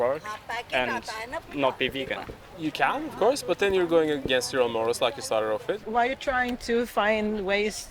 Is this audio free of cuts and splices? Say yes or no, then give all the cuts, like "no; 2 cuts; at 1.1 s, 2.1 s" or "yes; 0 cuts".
no; 2 cuts; at 2.4 s, 5.8 s